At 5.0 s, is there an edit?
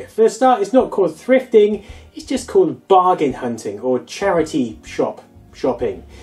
no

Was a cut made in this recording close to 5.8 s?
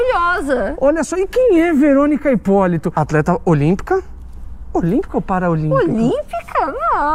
no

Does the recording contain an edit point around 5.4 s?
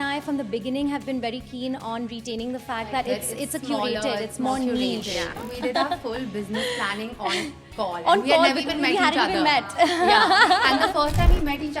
yes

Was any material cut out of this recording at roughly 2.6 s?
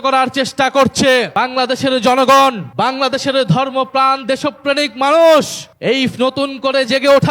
yes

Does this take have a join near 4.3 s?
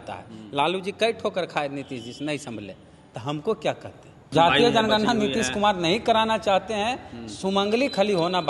yes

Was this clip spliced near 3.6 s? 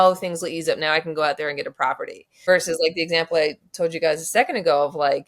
no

